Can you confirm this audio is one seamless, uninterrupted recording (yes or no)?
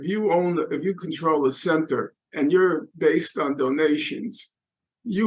no